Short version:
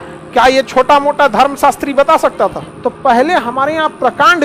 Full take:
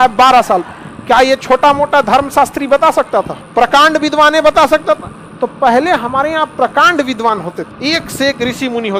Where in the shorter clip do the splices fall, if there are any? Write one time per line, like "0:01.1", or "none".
0:02.6